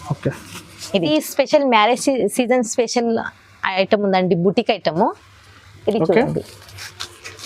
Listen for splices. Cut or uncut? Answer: cut